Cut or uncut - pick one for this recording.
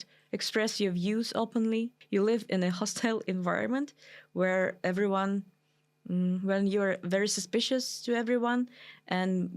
cut